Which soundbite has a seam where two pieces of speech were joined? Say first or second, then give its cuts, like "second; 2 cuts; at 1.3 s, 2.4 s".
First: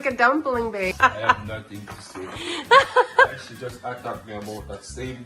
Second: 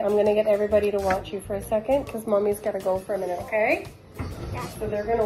first; 1 cut; at 0.9 s